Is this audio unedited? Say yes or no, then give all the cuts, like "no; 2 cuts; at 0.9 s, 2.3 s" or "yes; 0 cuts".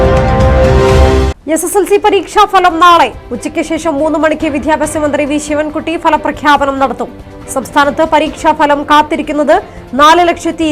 no; 1 cut; at 1.2 s